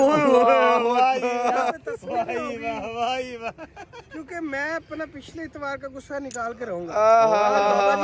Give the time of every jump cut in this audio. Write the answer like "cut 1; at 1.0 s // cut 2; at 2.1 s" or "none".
none